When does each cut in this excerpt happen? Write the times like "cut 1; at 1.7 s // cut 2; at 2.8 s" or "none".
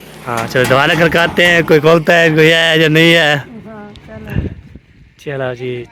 none